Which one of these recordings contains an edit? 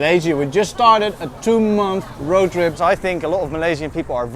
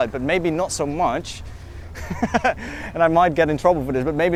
first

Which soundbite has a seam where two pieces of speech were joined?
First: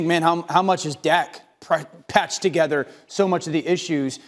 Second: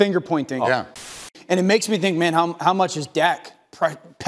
second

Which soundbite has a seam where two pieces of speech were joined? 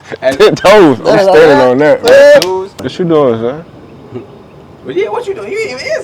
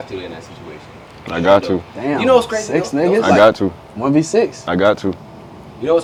first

